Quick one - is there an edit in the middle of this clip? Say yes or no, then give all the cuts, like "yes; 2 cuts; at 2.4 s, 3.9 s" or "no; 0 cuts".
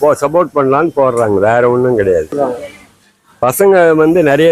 yes; 1 cut; at 2.3 s